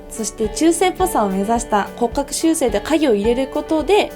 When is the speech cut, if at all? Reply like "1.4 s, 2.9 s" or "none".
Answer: 1.9 s